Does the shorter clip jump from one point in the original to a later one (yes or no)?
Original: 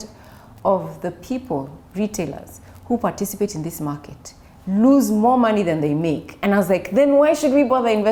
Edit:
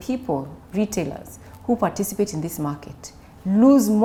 no